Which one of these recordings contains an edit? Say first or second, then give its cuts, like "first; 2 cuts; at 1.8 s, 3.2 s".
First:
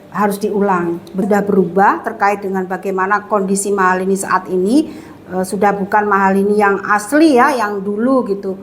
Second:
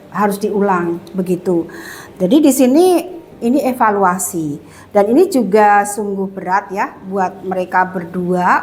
first; 1 cut; at 1.2 s